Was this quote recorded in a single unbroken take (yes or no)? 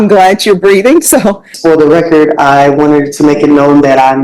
no